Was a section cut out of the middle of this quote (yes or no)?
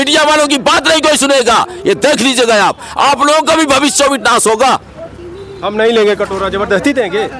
no